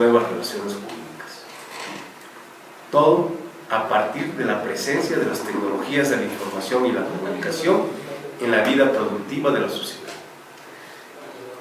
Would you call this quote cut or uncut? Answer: cut